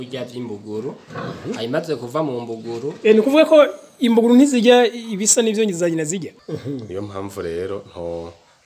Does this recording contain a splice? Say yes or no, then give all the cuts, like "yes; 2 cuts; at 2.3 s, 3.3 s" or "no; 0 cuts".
yes; 1 cut; at 6.4 s